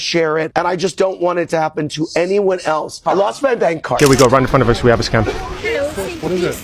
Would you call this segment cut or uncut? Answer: cut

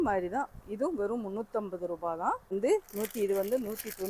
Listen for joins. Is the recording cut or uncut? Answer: cut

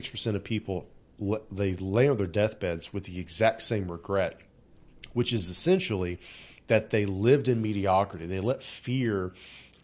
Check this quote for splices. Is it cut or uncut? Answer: uncut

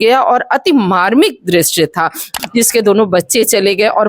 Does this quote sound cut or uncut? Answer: cut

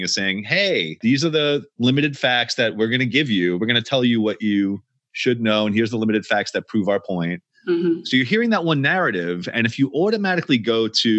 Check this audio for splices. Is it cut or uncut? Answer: cut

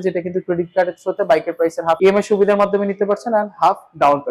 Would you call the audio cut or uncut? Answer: cut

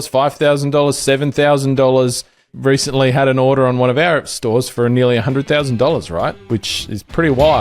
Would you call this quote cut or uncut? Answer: cut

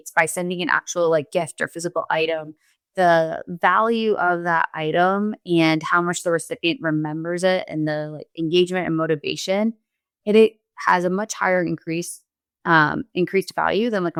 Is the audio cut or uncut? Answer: uncut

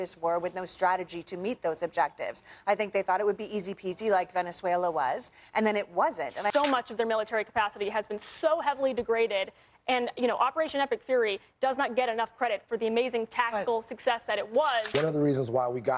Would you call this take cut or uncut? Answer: cut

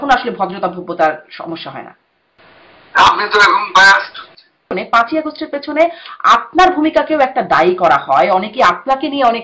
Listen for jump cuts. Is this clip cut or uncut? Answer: cut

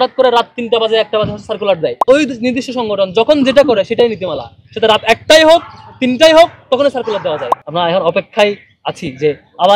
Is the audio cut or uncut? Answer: cut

